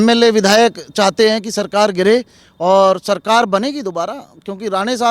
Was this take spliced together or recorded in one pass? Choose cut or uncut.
uncut